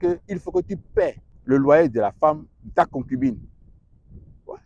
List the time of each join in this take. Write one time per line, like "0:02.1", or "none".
0:01.3